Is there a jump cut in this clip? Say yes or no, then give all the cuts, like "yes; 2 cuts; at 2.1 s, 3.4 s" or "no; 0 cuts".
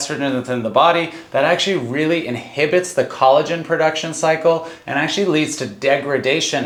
no; 0 cuts